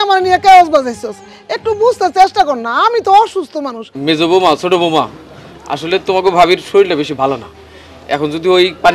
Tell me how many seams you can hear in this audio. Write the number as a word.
one